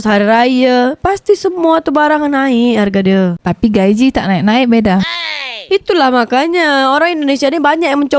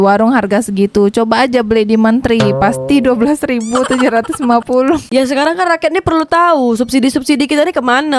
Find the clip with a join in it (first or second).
second